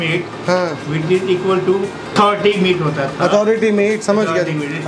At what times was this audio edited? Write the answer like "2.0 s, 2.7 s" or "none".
2.1 s